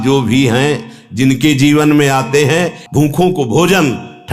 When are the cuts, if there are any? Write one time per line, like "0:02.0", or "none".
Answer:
0:02.8